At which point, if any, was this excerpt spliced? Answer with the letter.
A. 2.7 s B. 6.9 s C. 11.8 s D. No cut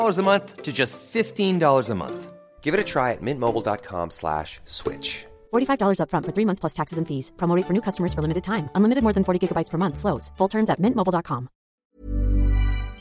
C